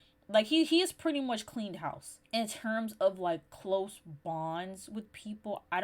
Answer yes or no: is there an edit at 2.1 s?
yes